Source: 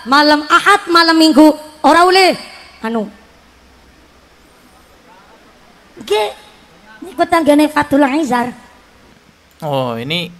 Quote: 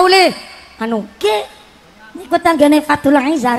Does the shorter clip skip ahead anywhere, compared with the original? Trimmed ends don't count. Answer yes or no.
yes